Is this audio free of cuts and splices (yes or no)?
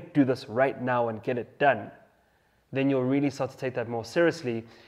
yes